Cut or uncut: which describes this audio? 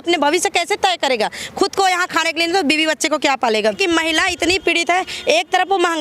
cut